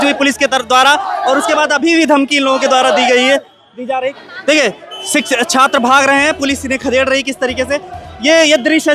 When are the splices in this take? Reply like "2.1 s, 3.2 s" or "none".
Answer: 4.2 s